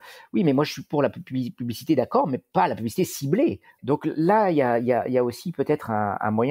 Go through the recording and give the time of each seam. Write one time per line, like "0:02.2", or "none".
0:03.7